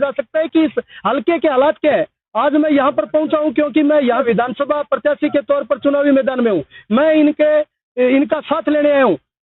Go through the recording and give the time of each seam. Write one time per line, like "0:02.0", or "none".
0:04.2

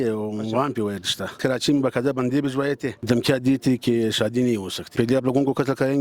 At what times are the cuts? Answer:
0:01.4
0:03.0
0:04.8

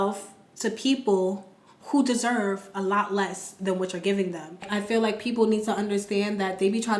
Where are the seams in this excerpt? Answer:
0:04.7

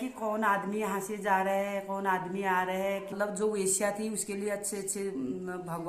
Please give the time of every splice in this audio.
0:03.2

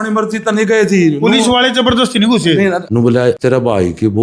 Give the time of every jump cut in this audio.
0:02.9

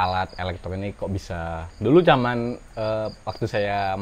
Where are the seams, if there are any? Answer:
0:01.6

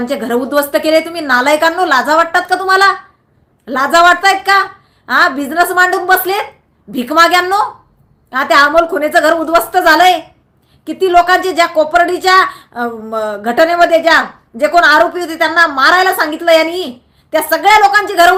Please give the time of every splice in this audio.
none

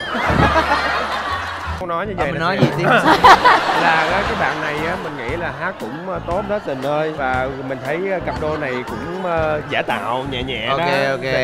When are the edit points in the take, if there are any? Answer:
0:01.8

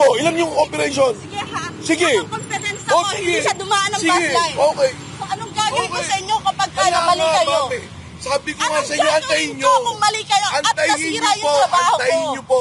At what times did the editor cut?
none

